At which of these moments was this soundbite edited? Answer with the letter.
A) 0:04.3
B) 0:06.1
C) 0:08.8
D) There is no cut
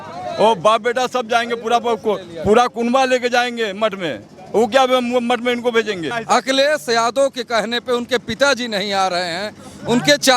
B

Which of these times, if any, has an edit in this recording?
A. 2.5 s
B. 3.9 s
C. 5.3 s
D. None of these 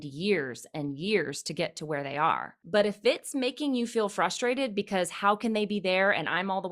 A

